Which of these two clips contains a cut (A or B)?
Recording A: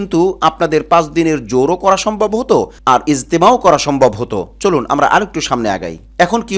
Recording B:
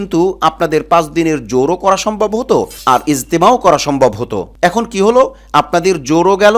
B